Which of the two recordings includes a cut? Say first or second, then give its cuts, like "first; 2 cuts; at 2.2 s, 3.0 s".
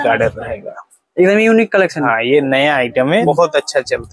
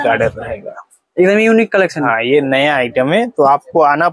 first; 1 cut; at 3.2 s